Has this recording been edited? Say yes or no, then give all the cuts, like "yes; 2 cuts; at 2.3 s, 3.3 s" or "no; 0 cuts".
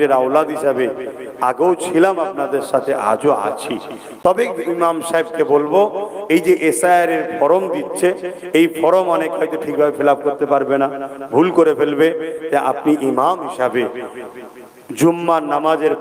no; 0 cuts